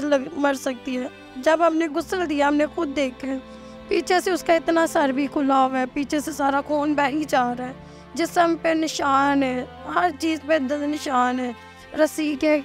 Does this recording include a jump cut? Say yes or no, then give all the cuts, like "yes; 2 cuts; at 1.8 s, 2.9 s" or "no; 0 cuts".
no; 0 cuts